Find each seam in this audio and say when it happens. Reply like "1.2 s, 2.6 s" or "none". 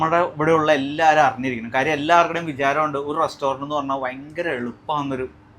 none